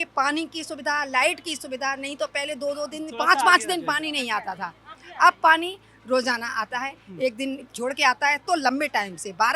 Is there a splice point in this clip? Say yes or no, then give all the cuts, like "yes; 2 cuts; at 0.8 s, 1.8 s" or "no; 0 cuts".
no; 0 cuts